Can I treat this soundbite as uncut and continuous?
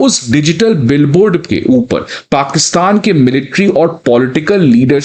yes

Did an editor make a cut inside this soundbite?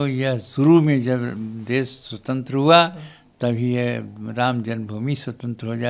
no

